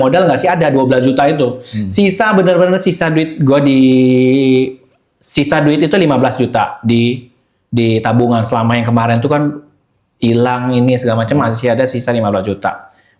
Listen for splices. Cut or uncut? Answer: uncut